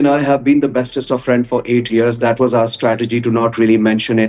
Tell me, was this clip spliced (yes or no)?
no